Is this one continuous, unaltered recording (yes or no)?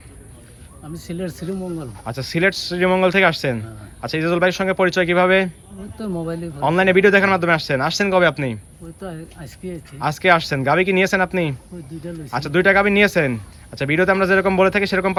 yes